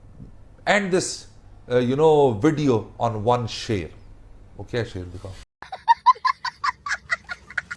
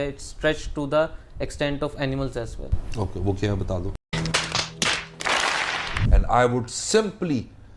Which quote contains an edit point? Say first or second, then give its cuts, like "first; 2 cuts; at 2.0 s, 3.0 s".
second; 1 cut; at 6.2 s